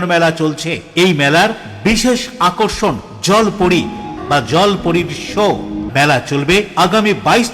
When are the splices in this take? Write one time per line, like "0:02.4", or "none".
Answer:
0:04.2
0:05.8